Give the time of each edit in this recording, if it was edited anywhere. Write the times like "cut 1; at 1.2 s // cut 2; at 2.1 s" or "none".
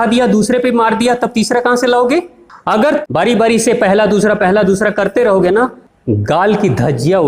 cut 1; at 2.8 s // cut 2; at 5.9 s